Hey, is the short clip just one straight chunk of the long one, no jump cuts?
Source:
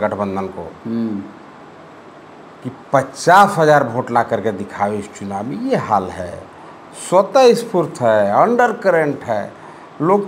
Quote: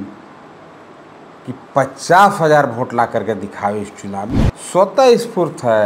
no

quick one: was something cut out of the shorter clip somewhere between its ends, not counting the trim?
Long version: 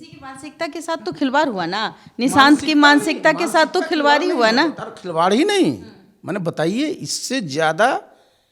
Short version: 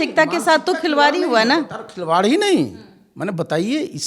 no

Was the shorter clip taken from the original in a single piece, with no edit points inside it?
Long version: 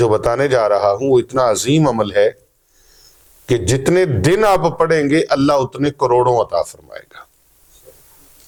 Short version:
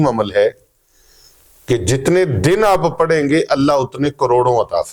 yes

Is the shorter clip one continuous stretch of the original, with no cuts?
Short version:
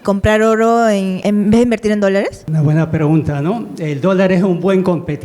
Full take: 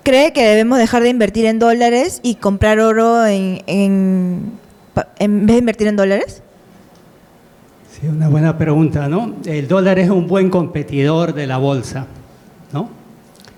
no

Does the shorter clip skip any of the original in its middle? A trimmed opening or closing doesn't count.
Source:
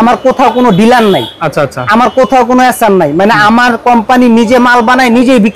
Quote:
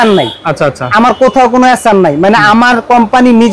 no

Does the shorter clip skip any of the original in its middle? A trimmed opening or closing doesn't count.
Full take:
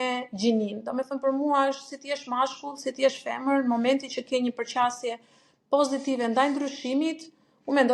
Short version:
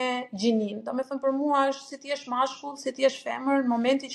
no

